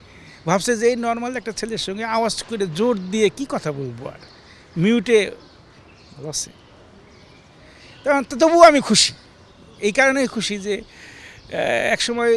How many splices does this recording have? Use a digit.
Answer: 0